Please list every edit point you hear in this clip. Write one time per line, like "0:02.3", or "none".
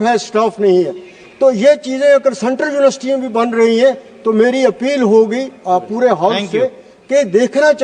none